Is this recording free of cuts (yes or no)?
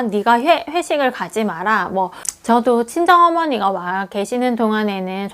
no